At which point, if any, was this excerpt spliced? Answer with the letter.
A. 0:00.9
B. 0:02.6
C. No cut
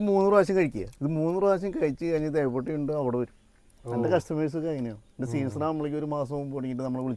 A